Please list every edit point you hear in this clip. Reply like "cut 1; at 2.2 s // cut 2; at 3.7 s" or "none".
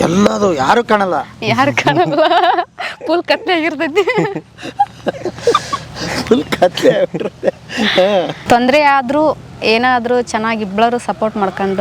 cut 1; at 8.4 s

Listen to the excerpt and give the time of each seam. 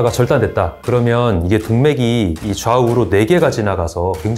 none

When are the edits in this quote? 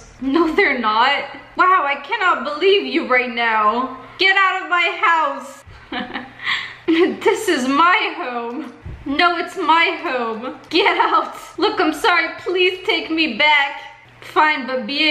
none

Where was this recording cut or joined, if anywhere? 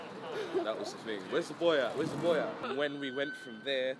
cut 1; at 2.6 s

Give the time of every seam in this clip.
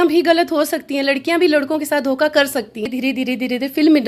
cut 1; at 2.8 s

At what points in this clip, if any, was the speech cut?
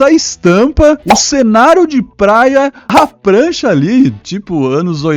cut 1; at 1.2 s // cut 2; at 3.0 s

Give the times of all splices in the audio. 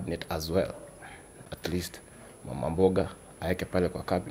cut 1; at 1.4 s

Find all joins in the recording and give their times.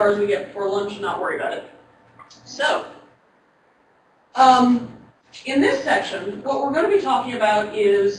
none

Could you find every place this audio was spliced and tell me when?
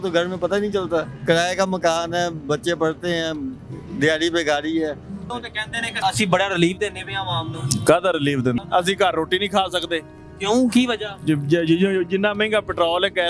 cut 1; at 1.1 s // cut 2; at 5.2 s // cut 3; at 8.6 s

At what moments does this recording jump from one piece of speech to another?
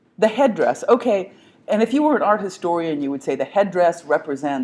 cut 1; at 1.2 s

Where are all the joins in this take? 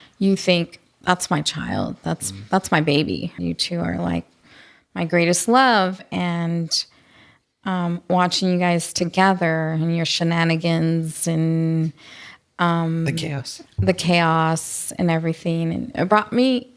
cut 1; at 3.4 s

